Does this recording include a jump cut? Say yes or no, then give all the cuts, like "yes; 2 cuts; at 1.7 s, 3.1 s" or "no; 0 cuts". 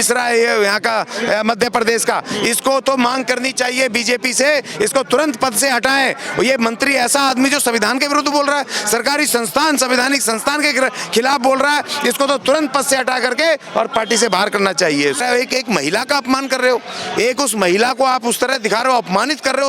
yes; 1 cut; at 15.2 s